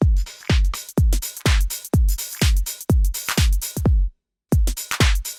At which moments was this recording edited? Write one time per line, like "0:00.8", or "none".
none

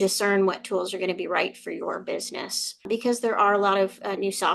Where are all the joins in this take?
0:02.8

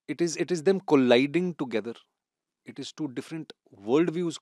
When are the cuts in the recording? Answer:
none

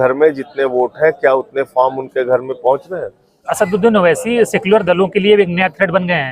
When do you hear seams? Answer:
0:03.4

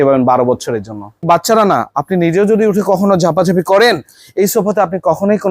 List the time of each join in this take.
0:01.1

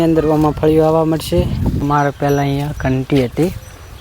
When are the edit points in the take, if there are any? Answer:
0:01.8

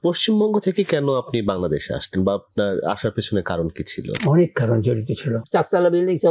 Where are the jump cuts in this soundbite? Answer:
0:05.4

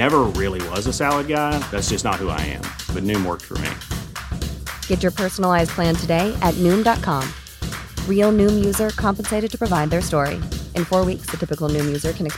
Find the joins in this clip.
none

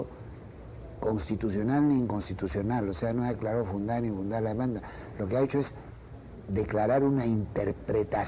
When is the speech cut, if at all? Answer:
0:03.2

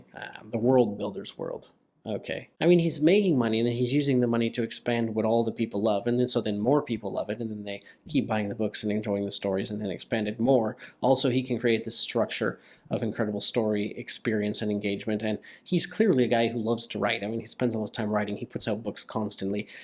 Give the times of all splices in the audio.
0:02.4

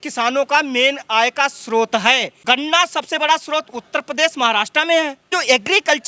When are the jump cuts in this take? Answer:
0:02.3
0:05.3

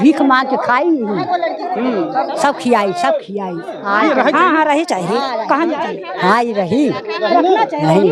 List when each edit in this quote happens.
0:03.8

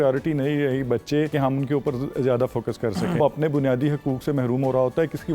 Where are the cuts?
0:01.3
0:03.2

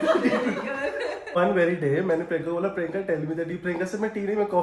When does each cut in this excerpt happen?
0:01.4

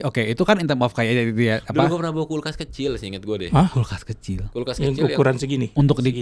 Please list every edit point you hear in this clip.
none

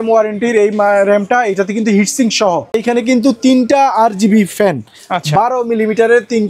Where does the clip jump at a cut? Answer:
0:02.8

